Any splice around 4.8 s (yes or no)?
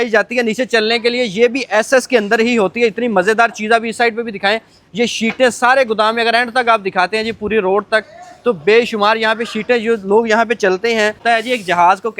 no